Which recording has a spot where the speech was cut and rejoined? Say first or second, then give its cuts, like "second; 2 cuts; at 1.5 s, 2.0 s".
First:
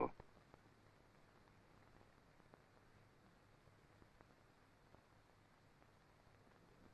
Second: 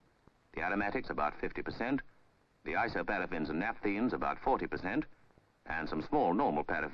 second; 1 cut; at 3.0 s